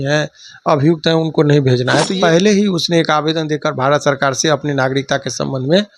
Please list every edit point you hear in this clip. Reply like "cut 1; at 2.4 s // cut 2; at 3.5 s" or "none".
cut 1; at 2.1 s